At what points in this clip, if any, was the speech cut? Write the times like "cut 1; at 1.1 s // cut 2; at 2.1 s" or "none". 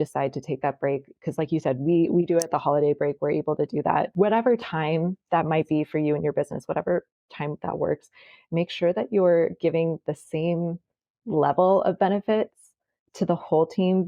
cut 1; at 4.1 s